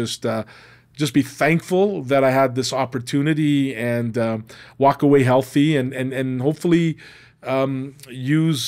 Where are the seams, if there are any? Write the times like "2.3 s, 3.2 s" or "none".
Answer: none